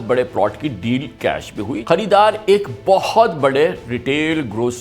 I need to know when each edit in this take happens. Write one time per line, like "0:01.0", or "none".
0:01.8